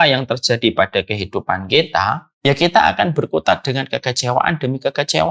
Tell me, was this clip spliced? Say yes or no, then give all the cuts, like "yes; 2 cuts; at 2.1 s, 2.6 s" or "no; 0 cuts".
yes; 1 cut; at 2.3 s